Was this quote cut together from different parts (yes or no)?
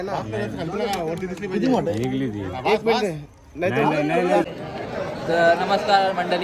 yes